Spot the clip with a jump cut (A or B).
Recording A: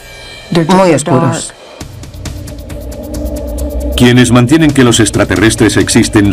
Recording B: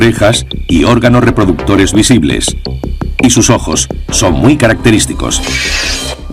B